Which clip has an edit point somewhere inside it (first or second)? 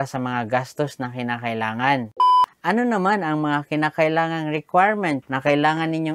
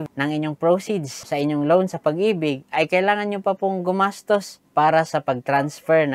first